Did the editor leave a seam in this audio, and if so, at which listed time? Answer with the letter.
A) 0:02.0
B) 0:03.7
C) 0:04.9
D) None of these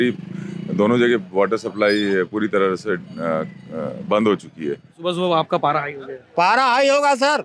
C